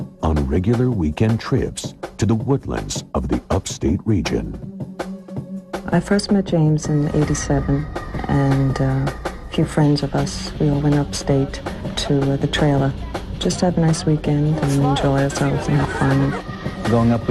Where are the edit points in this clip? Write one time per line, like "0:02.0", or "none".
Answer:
0:01.1